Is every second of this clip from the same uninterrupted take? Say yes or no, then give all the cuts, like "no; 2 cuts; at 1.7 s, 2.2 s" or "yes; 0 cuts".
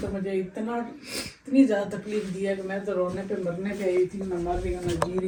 yes; 0 cuts